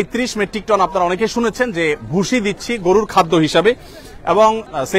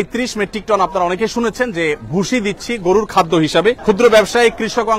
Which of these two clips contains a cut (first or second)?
second